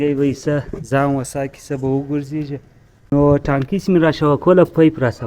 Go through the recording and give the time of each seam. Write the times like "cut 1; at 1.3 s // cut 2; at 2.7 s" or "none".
cut 1; at 3.1 s